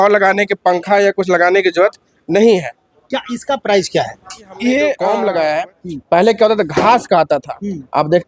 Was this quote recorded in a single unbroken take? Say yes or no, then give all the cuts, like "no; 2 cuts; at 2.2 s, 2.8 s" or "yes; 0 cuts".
no; 1 cut; at 5.0 s